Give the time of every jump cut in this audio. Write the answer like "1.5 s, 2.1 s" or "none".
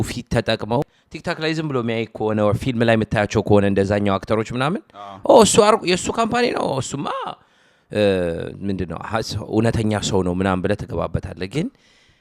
1.0 s